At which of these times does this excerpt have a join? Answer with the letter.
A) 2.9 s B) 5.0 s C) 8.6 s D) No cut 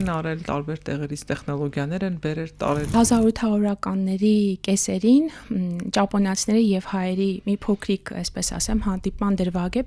A